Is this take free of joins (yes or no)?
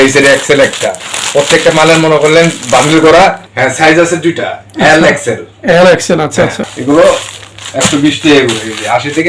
no